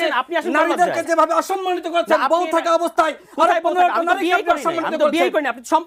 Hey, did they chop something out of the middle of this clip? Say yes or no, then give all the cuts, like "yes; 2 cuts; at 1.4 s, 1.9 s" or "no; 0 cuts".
no; 0 cuts